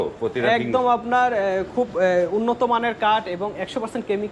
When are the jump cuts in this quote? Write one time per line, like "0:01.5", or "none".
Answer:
none